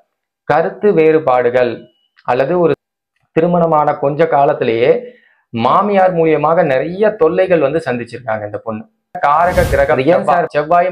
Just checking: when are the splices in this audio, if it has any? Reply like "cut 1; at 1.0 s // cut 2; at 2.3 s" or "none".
cut 1; at 2.8 s // cut 2; at 9.2 s